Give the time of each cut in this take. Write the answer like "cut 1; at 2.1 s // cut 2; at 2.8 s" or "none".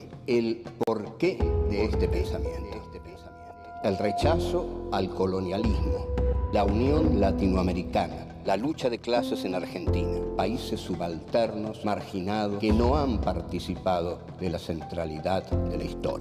none